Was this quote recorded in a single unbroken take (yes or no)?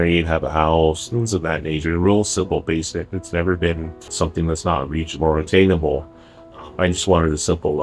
yes